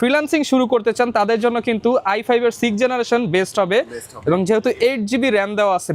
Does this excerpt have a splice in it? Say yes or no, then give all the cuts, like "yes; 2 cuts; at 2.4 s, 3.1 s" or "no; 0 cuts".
no; 0 cuts